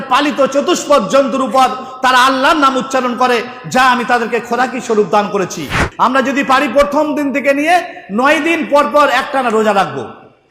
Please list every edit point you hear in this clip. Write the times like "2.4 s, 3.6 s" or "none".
5.8 s

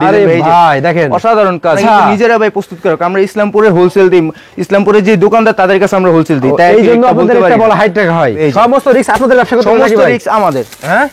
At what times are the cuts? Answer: 1.8 s, 8.4 s

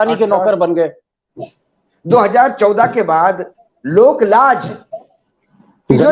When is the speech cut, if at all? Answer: 1.6 s, 3.5 s

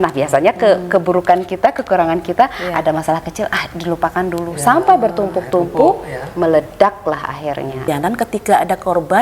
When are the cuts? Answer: 7.9 s

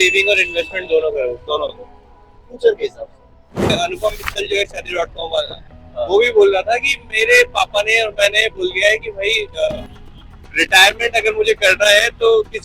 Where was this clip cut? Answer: 3.7 s

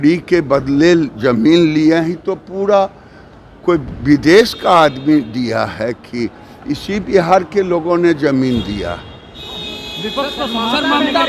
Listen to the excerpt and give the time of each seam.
none

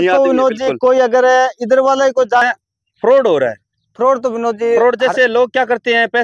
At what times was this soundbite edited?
2.4 s

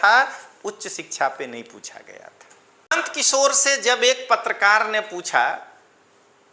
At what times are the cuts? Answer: 2.9 s

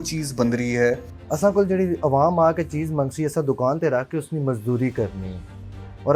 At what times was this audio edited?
1.1 s

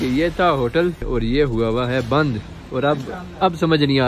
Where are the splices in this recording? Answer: 1.0 s

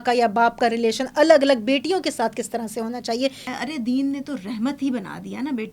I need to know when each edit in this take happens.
3.4 s

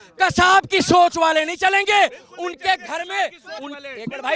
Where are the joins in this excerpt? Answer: none

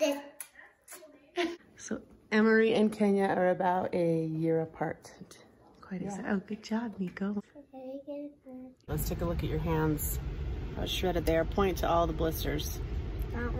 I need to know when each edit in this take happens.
1.6 s, 7.4 s, 8.9 s

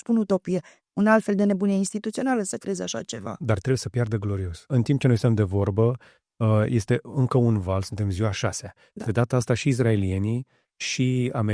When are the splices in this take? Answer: 4.7 s

